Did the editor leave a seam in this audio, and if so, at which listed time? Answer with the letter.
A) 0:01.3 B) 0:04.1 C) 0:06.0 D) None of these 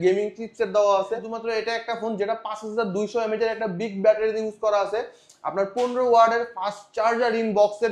A